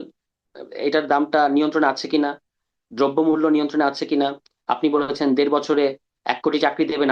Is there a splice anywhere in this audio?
no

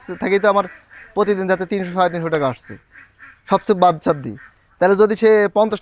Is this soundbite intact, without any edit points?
yes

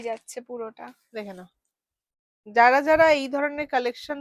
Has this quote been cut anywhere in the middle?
no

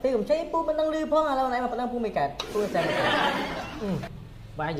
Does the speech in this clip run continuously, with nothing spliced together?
no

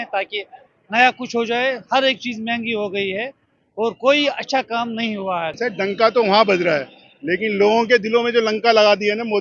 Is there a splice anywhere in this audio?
yes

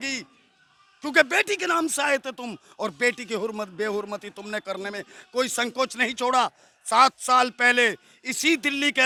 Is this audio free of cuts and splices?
yes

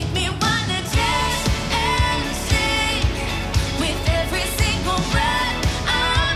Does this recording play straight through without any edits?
yes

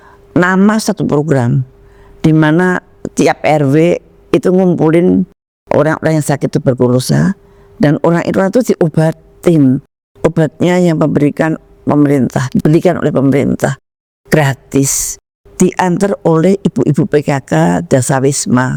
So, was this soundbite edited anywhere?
no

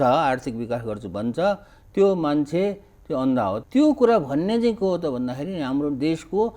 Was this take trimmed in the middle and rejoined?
yes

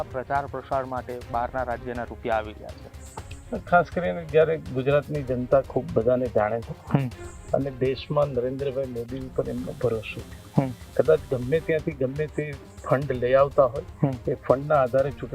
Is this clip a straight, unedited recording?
yes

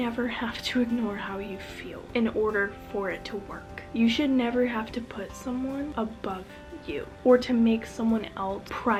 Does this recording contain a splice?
no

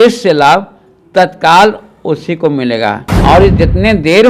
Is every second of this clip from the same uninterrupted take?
no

